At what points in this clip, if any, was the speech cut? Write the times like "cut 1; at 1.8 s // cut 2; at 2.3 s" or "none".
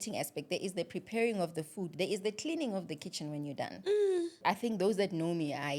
cut 1; at 4.4 s